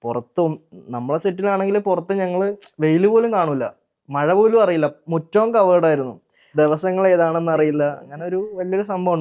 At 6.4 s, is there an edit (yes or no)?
yes